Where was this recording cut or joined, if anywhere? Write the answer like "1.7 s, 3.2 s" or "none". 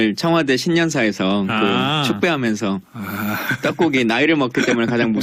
none